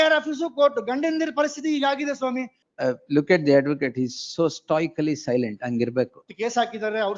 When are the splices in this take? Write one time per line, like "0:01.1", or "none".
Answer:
0:02.6